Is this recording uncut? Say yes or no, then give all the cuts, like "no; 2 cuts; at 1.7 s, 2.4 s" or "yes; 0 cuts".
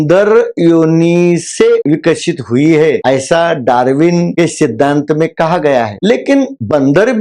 yes; 0 cuts